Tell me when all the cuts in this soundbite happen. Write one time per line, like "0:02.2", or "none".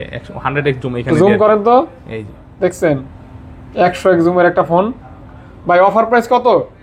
none